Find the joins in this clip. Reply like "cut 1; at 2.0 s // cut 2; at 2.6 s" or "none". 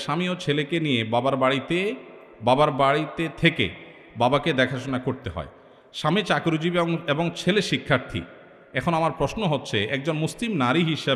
none